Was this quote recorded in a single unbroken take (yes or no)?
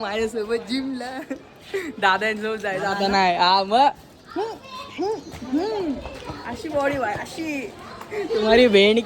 yes